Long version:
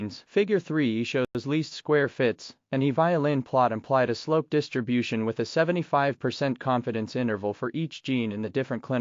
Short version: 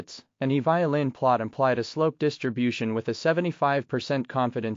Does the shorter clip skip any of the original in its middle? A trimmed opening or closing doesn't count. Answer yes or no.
no